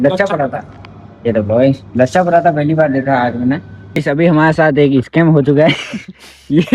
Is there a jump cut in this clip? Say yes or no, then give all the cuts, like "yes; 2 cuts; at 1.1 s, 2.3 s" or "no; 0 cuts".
yes; 1 cut; at 3.9 s